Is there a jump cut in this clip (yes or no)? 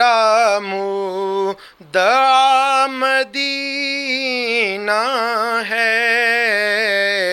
no